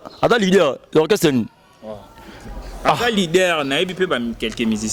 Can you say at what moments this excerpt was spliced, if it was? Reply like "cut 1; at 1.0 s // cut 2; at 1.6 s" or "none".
none